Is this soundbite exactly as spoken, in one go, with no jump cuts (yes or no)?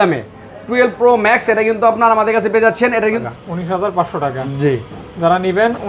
no